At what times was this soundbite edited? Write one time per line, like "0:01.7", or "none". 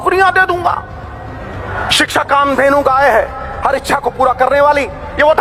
none